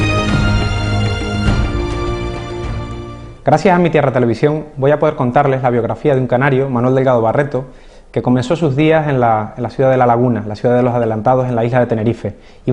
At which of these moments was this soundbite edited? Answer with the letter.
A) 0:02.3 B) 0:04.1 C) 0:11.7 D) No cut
C